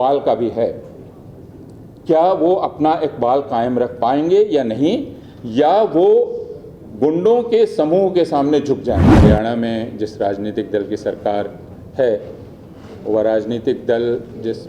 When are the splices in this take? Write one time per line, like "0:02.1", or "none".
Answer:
0:09.1